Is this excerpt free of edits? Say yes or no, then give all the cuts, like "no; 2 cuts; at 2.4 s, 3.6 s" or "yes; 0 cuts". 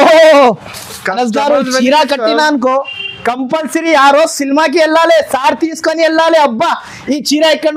yes; 0 cuts